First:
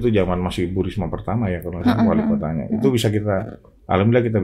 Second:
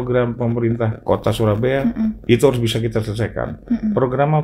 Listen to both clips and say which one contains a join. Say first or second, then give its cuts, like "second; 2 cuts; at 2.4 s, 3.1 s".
second; 1 cut; at 1.0 s